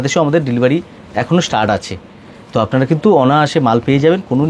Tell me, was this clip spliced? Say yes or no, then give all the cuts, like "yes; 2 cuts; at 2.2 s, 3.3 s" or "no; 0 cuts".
no; 0 cuts